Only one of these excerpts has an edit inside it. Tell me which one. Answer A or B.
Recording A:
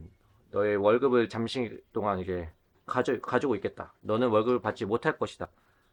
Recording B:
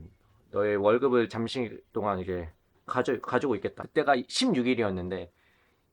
B